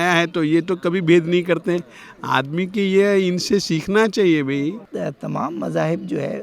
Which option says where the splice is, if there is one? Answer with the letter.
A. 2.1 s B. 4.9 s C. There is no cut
B